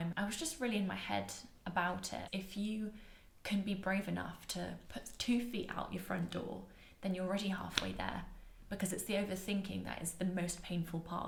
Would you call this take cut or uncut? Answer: uncut